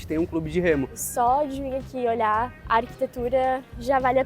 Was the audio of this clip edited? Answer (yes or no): yes